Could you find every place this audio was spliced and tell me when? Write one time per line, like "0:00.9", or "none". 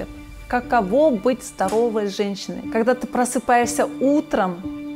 none